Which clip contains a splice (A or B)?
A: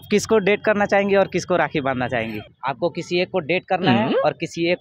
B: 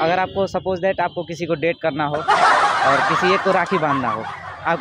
A